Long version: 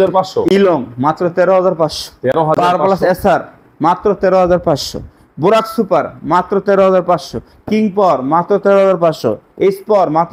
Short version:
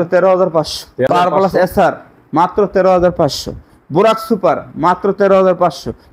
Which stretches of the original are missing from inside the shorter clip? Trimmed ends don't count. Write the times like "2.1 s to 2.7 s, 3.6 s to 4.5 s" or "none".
2.3 s to 2.6 s